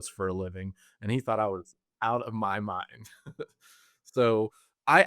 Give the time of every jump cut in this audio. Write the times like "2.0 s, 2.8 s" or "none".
none